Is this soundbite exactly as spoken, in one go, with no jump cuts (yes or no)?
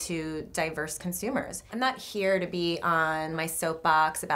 no